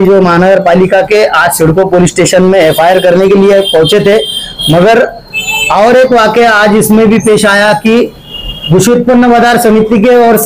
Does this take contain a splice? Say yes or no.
no